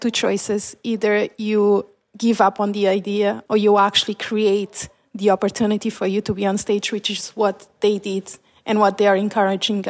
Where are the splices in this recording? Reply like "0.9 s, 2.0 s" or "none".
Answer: 3.4 s